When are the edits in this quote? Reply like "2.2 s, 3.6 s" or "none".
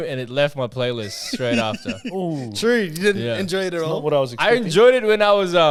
none